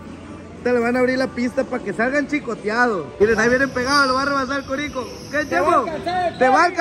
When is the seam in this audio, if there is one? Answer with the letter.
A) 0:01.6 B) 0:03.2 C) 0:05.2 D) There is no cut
B